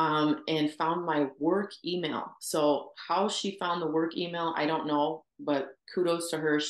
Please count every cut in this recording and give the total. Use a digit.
0